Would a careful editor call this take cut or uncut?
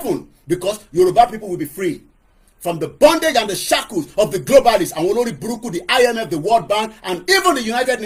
uncut